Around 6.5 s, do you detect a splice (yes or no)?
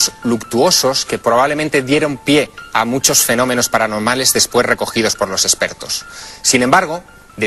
yes